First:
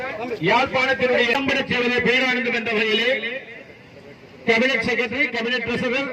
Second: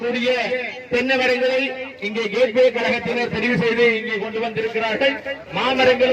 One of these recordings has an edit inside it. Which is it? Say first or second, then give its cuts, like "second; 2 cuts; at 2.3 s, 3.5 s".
first; 1 cut; at 1.3 s